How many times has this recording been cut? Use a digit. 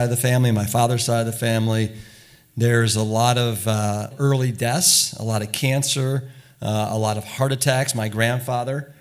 2